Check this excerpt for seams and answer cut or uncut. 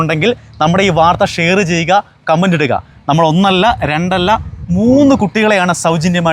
uncut